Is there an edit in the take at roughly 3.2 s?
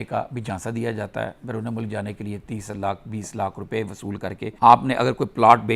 no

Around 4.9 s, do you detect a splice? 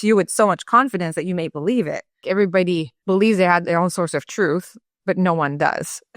no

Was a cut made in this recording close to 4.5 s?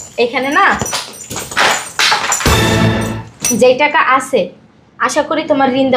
no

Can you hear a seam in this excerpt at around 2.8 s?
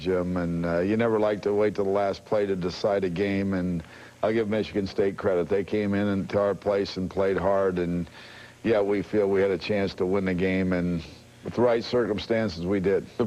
yes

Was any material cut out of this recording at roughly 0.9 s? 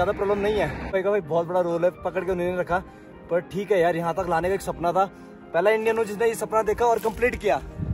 yes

